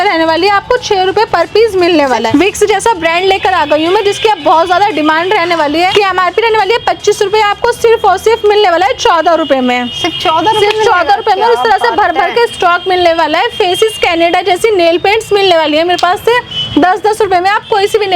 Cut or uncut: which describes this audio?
uncut